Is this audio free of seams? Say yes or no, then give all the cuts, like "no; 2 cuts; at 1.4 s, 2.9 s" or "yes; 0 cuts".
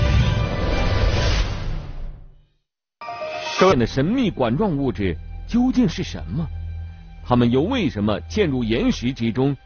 yes; 0 cuts